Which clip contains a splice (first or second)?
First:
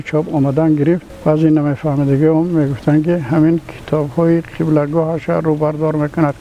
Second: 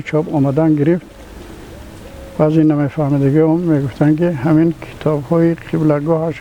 first